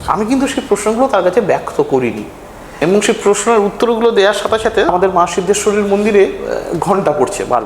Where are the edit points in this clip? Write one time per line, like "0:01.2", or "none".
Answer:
0:02.8
0:04.9

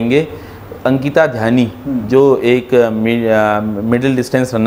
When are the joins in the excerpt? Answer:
none

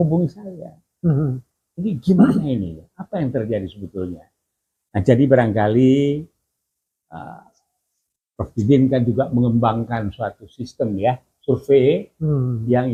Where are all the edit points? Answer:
none

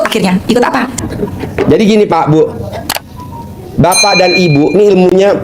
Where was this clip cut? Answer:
0:01.0

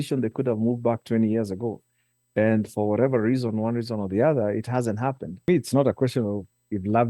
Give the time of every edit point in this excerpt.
0:05.5

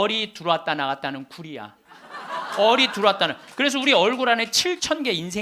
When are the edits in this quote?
none

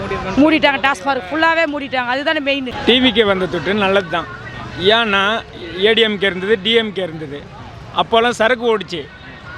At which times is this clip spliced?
0:02.8

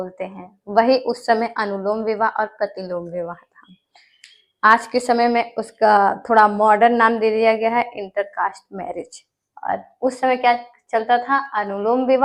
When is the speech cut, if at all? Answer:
none

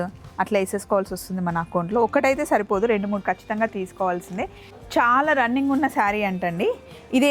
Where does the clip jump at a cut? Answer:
none

